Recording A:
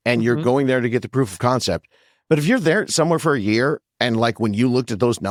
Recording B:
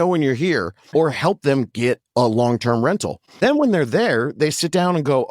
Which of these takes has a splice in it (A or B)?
B